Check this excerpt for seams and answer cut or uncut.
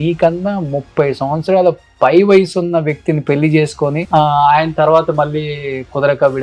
uncut